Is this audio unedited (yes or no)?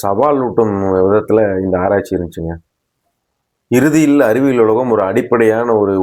yes